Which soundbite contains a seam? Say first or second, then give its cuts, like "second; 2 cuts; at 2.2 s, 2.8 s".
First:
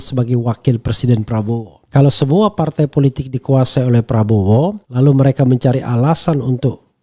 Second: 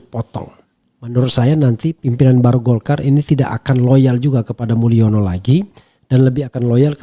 first; 1 cut; at 1.8 s